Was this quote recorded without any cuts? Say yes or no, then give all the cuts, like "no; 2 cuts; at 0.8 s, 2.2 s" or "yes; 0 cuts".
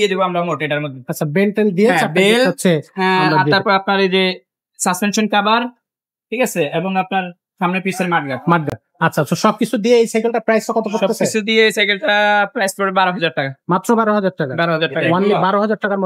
yes; 0 cuts